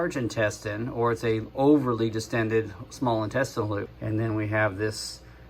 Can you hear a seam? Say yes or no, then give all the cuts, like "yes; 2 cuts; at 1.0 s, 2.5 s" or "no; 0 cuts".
yes; 1 cut; at 3.9 s